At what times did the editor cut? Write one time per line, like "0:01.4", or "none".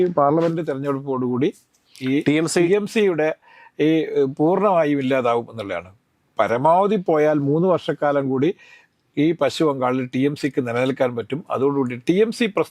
none